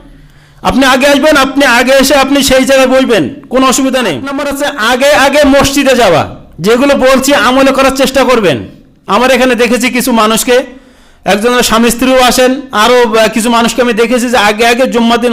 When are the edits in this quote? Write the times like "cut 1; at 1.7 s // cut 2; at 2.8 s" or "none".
cut 1; at 4.5 s

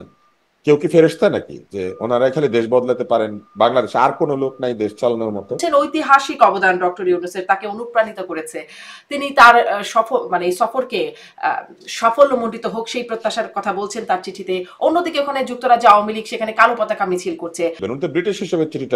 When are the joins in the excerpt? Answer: cut 1; at 5.6 s // cut 2; at 17.8 s

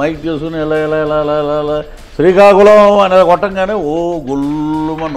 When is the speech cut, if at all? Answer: none

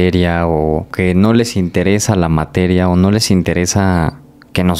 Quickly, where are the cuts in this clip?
cut 1; at 0.9 s

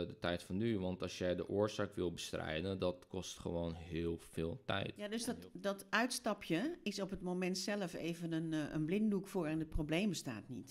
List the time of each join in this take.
cut 1; at 5.0 s

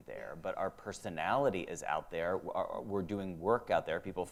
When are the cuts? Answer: none

